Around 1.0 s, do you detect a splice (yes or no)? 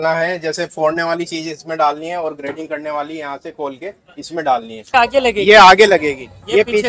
no